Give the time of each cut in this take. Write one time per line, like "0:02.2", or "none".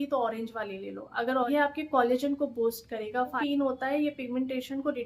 0:01.5
0:03.4